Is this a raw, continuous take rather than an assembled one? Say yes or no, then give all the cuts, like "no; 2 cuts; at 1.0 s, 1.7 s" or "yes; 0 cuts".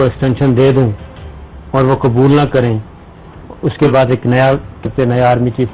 yes; 0 cuts